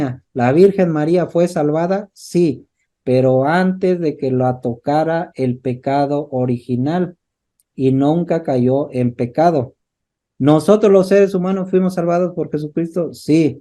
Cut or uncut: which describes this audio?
uncut